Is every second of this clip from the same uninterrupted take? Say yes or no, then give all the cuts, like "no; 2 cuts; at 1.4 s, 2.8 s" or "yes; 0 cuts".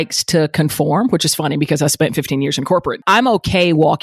no; 1 cut; at 3.0 s